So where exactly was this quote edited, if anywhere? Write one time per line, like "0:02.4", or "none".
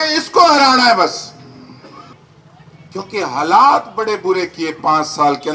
0:02.2